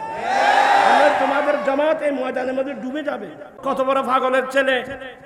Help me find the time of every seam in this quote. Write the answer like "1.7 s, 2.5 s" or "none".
3.6 s